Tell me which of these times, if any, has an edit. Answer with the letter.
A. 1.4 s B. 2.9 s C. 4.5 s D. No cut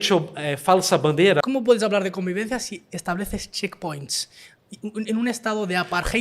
A